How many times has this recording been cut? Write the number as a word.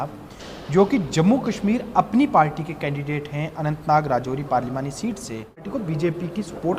one